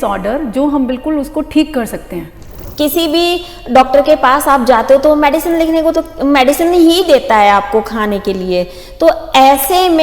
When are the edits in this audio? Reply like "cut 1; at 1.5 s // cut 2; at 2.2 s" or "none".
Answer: cut 1; at 2.6 s